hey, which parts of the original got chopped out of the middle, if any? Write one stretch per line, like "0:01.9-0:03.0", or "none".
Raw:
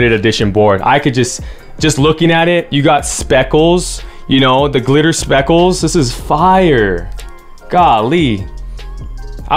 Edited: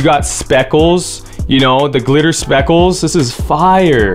none